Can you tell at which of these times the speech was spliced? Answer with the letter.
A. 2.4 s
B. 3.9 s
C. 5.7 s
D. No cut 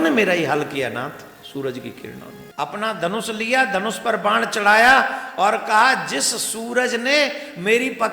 A